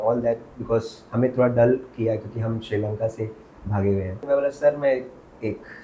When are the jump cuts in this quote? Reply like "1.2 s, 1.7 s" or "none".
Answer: 4.1 s